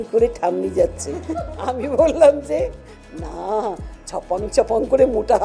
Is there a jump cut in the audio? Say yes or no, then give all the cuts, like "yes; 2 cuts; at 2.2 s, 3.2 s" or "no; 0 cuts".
no; 0 cuts